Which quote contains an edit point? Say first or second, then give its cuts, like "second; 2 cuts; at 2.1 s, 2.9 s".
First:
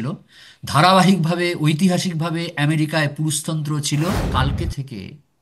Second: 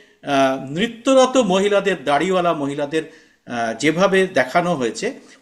first; 1 cut; at 4.2 s